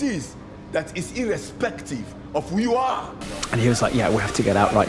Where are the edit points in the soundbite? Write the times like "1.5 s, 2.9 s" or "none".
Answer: 3.2 s